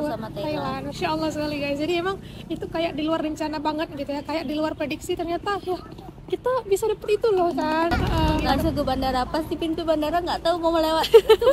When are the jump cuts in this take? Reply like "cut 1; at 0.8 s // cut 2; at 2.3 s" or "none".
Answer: cut 1; at 2.0 s // cut 2; at 8.0 s